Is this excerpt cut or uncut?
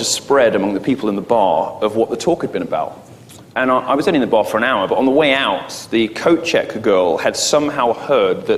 cut